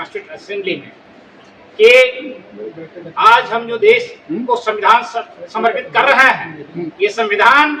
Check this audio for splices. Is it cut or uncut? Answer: uncut